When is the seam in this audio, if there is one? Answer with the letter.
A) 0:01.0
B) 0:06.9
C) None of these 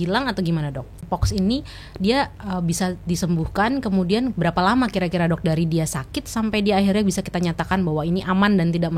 A